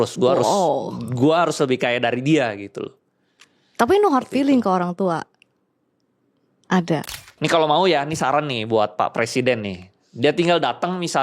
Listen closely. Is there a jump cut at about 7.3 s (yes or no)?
yes